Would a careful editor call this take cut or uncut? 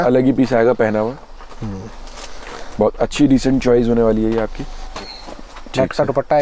uncut